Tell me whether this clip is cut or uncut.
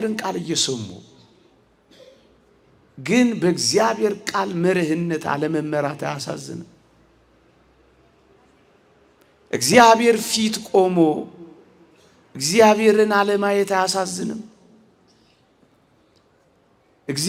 uncut